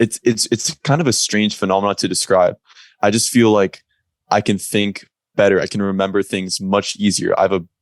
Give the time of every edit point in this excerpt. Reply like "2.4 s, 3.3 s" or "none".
none